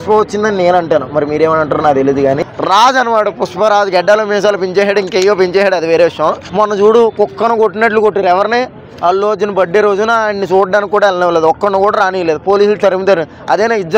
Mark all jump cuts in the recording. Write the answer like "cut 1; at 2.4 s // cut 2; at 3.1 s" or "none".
cut 1; at 2.4 s // cut 2; at 6.4 s